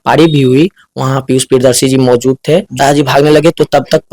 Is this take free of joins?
no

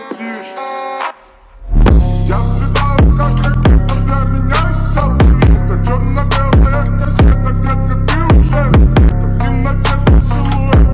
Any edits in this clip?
no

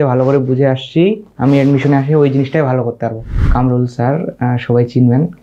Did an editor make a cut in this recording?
yes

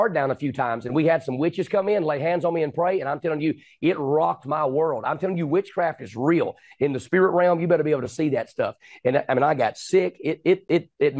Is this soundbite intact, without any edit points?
yes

